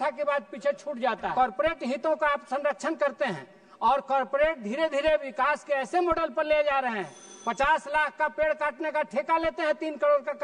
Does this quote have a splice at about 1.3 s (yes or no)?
yes